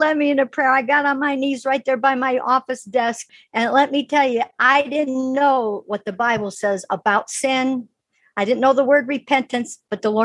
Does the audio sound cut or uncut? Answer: cut